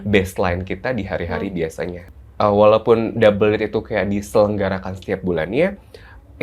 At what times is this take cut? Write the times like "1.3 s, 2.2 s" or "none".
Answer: 2.1 s

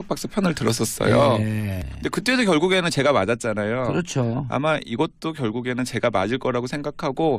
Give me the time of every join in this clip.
none

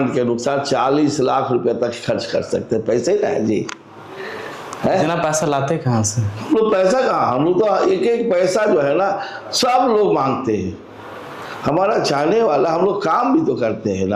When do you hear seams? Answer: none

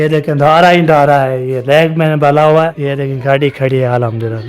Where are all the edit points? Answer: 2.7 s

